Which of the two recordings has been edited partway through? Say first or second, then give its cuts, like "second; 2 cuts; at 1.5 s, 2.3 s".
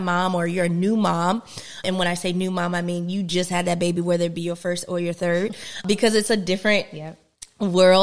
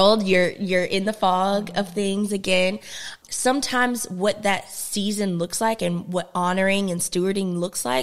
first; 2 cuts; at 1.8 s, 5.8 s